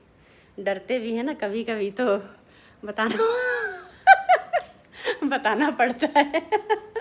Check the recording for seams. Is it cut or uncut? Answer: uncut